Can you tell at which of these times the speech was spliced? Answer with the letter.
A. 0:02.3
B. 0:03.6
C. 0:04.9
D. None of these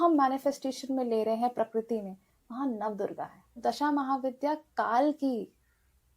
B